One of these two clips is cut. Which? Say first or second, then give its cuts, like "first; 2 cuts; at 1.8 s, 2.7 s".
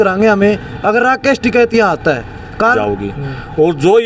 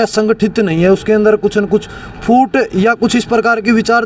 first; 1 cut; at 2.8 s